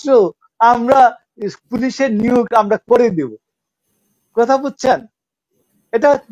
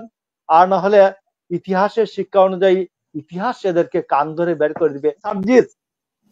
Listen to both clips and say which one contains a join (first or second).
second